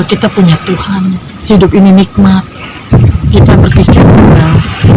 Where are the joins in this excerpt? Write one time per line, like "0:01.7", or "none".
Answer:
0:01.3

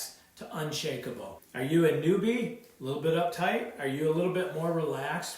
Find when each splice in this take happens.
0:01.3

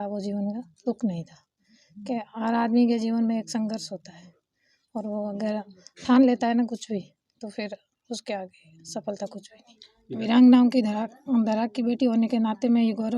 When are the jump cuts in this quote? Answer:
0:10.2

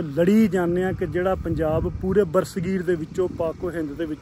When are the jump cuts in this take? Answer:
none

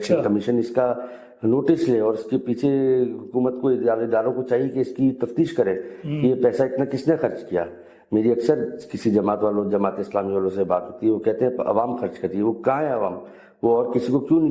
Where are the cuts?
none

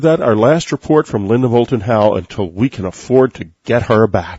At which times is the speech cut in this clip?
0:03.2

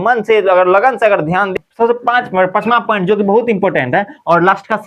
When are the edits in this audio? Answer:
0:01.5

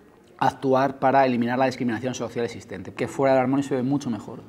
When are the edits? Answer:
0:02.9

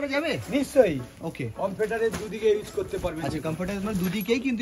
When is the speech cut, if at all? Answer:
none

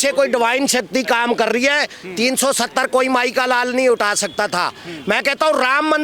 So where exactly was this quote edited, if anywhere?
none

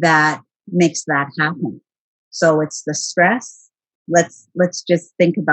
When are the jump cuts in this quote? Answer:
0:04.0

